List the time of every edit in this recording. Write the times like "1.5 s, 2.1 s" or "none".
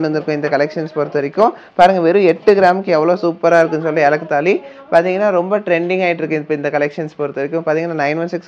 none